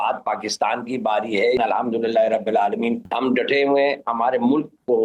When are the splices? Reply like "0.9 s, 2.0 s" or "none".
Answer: 1.6 s, 3.1 s, 4.1 s